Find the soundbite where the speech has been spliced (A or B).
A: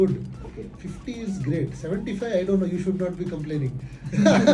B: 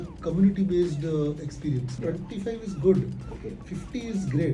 B